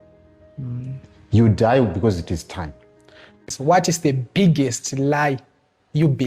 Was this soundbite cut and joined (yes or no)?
yes